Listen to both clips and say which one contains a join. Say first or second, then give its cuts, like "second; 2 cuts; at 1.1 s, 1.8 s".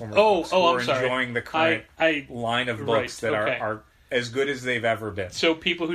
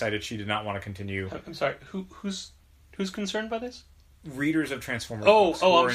second; 1 cut; at 2.6 s